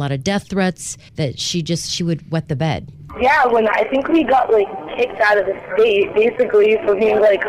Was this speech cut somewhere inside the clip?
yes; 1 cut; at 1.0 s

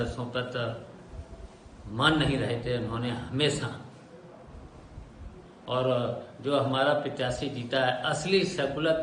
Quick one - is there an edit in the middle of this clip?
no; 0 cuts

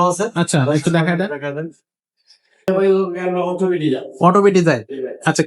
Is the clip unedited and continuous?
no; 1 cut; at 2.7 s

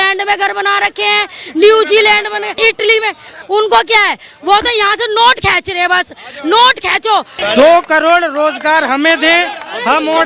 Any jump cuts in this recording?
yes; 3 cuts; at 2.5 s, 3.3 s, 7.3 s

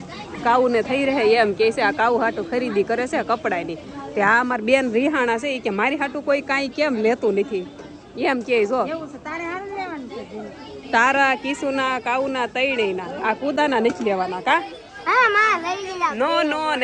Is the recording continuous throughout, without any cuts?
yes; 0 cuts

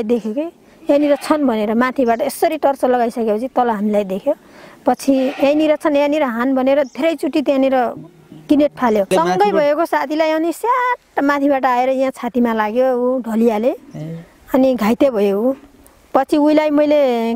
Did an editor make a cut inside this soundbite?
yes; 1 cut; at 9.1 s

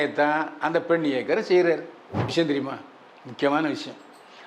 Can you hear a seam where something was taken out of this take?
yes; 1 cut; at 2.3 s

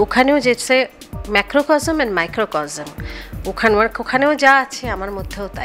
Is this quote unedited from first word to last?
yes; 0 cuts

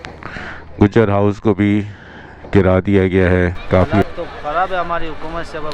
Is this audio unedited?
no; 1 cut; at 3.9 s

